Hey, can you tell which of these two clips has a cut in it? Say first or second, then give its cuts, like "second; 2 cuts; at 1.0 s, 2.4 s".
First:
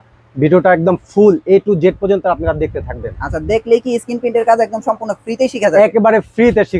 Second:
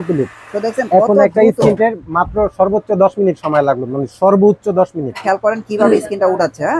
second; 1 cut; at 5.2 s